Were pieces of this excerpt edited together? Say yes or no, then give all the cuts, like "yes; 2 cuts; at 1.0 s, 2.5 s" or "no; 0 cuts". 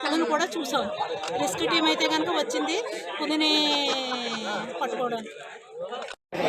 no; 0 cuts